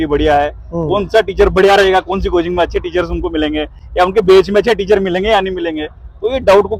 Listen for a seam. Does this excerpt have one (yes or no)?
no